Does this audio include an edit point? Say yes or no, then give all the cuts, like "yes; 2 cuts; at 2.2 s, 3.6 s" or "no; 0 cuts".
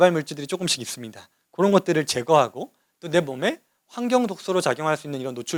no; 0 cuts